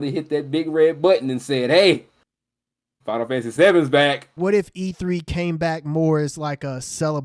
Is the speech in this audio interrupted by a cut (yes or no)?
yes